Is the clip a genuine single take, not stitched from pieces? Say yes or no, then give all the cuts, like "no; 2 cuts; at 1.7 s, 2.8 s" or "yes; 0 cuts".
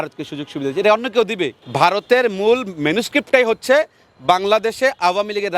no; 1 cut; at 1.6 s